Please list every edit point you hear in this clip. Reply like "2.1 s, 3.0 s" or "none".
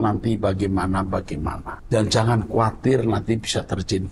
1.7 s